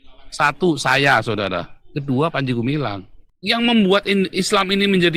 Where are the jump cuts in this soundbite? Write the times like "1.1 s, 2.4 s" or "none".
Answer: 3.2 s